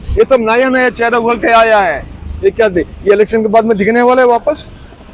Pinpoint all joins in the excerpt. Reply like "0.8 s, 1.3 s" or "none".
none